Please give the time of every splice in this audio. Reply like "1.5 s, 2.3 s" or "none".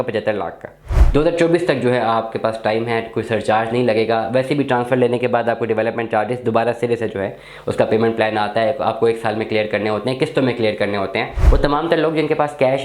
1.1 s, 11.4 s